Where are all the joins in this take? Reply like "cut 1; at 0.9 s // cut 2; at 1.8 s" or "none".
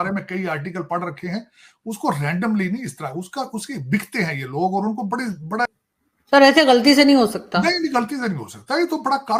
cut 1; at 5.8 s